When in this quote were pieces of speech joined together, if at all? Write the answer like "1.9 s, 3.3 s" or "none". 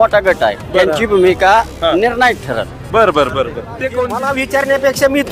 4.2 s